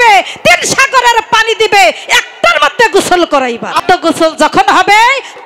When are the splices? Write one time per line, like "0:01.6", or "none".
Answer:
0:03.8